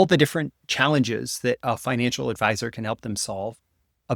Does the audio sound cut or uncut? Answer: uncut